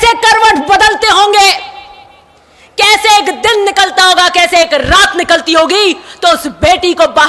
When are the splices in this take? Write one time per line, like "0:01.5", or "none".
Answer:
none